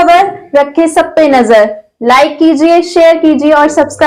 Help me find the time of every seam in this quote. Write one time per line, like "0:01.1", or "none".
none